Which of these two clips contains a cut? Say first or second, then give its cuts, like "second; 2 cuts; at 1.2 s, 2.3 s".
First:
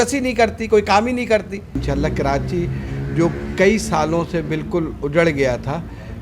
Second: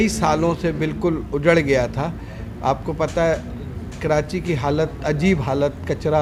first; 1 cut; at 1.8 s